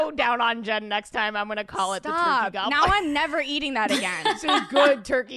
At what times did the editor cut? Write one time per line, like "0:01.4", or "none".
0:04.4